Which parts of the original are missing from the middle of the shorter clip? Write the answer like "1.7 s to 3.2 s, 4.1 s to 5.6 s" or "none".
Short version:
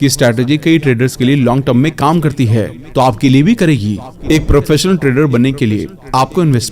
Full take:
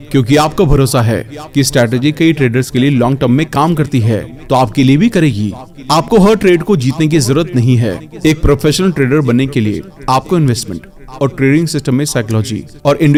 5.7 s to 8.1 s